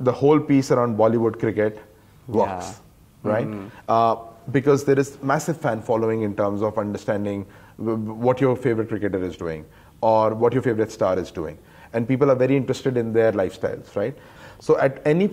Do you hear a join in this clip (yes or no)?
yes